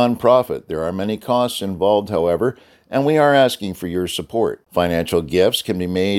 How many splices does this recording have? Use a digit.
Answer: 0